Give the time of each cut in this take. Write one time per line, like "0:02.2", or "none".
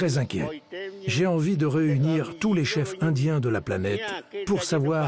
0:00.9